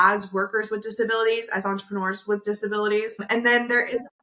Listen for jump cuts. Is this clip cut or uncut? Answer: uncut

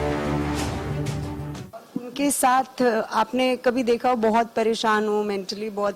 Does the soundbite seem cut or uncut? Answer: uncut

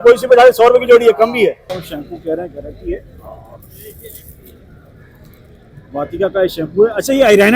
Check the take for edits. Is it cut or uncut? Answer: cut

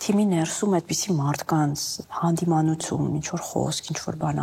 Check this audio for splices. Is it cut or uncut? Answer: cut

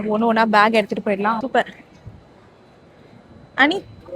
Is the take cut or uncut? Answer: cut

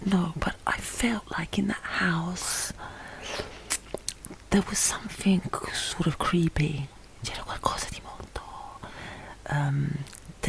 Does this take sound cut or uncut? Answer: uncut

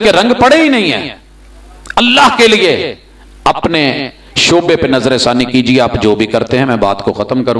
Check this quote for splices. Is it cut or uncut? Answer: uncut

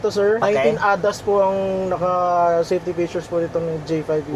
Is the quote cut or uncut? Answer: uncut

